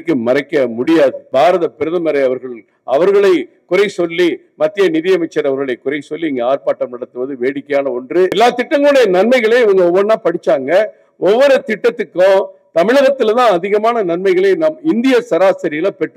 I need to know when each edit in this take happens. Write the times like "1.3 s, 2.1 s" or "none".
1.2 s, 8.3 s